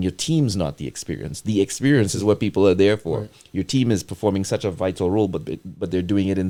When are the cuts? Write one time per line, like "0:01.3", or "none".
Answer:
none